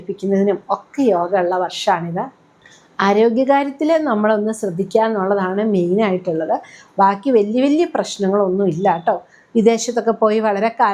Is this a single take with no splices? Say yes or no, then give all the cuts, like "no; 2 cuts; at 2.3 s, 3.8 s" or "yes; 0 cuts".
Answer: yes; 0 cuts